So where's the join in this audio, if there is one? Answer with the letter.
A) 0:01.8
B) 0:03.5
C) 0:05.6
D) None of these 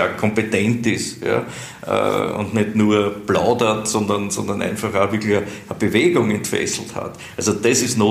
D